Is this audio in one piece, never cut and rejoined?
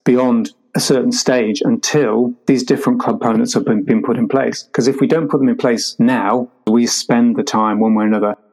no; 1 cut; at 6.7 s

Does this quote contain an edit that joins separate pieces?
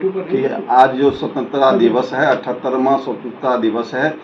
no; 0 cuts

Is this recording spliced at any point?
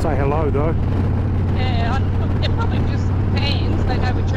no; 0 cuts

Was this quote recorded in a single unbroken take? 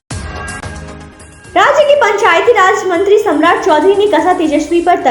yes; 0 cuts

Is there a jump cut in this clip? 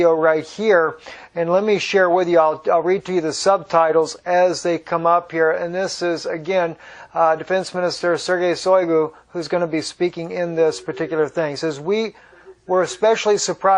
no; 0 cuts

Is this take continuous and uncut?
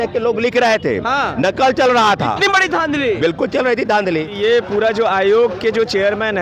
no; 1 cut; at 4.3 s

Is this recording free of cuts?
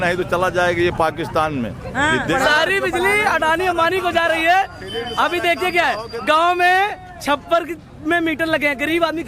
no; 1 cut; at 2.3 s

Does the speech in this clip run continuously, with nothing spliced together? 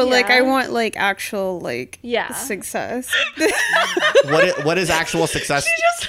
no; 1 cut; at 3.1 s

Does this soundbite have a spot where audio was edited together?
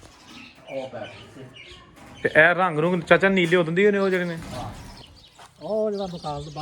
yes; 1 cut; at 4.8 s

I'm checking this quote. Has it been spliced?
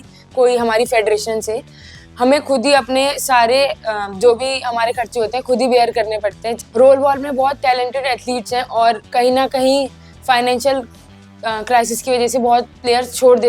yes; 1 cut; at 6.4 s

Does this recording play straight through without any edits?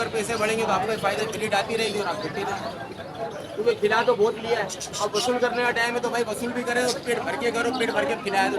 yes; 0 cuts

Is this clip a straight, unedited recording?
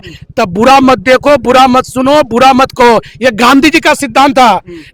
yes; 0 cuts

